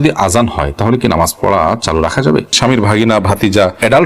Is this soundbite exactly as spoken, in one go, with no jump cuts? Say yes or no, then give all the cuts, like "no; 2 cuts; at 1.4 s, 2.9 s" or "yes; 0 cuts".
no; 1 cut; at 2.5 s